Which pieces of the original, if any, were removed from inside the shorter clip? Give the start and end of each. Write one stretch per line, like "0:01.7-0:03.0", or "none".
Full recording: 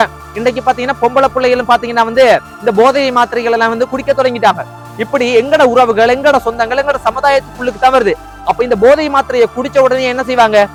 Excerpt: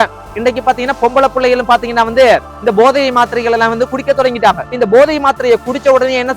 0:04.7-0:08.6